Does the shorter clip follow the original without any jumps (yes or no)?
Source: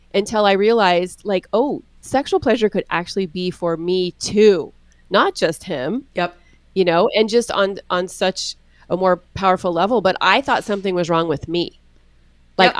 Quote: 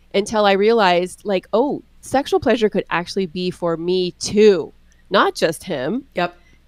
yes